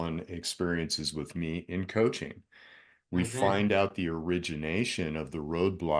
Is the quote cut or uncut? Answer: uncut